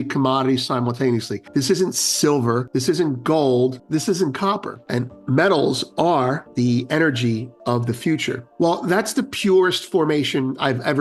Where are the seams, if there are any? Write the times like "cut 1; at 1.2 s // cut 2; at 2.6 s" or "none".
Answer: cut 1; at 1.4 s // cut 2; at 2.7 s // cut 3; at 3.8 s // cut 4; at 4.7 s // cut 5; at 6.4 s // cut 6; at 8.5 s